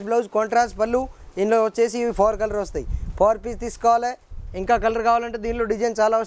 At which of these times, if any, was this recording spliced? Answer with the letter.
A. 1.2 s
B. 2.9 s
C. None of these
C